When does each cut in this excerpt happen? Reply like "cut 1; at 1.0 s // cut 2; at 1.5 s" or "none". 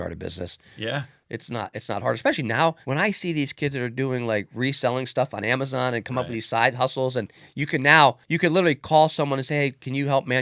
cut 1; at 2.8 s // cut 2; at 8.3 s